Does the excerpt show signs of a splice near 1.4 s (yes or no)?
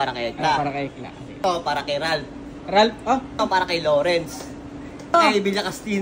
yes